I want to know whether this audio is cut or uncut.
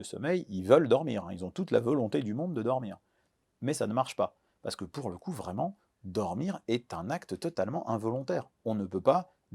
uncut